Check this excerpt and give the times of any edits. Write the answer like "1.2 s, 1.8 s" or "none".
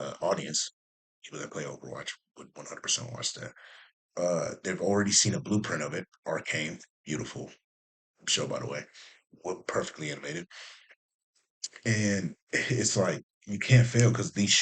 none